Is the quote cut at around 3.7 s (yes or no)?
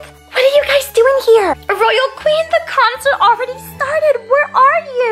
no